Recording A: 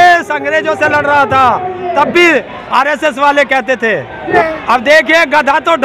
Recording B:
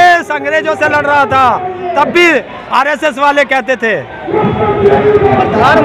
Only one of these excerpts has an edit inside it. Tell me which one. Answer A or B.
A